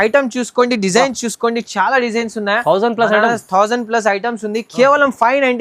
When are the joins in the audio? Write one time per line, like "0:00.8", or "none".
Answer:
none